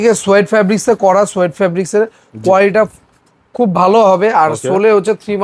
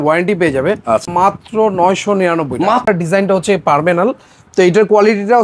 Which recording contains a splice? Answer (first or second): second